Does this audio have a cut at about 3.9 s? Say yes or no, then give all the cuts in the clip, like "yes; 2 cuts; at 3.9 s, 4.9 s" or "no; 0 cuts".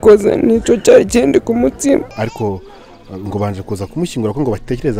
no; 1 cut; at 2.1 s